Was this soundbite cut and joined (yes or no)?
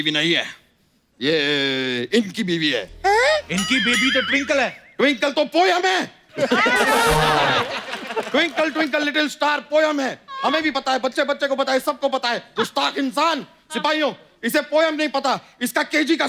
no